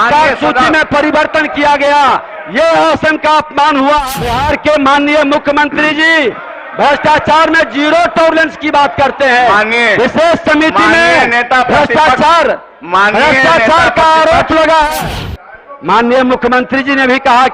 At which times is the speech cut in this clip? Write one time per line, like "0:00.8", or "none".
0:04.0
0:15.2

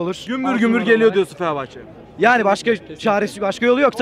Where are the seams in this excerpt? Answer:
none

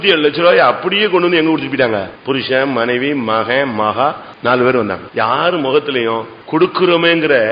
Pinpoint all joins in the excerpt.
0:02.1
0:04.3
0:05.0
0:06.3

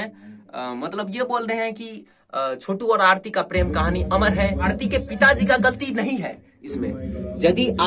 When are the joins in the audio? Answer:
0:04.7

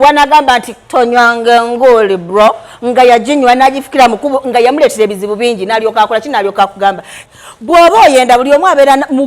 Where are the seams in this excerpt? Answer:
0:07.1

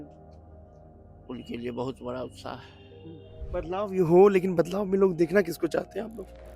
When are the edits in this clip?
0:03.3

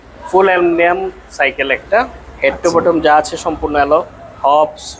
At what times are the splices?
none

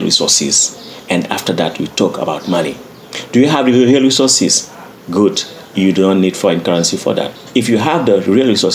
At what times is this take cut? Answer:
0:07.4

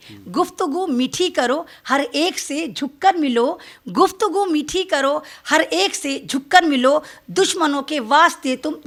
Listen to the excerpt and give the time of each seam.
none

